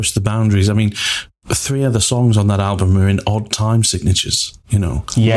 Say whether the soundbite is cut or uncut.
uncut